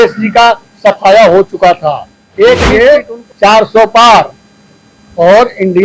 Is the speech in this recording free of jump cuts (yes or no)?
no